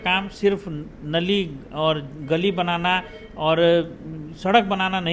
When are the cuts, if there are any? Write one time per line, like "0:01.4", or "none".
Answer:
none